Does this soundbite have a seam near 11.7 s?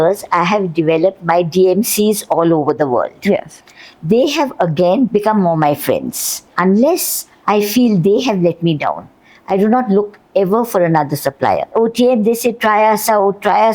yes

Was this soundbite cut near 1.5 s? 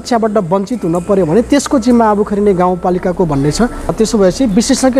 no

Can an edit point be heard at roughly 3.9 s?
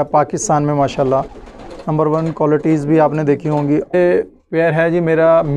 yes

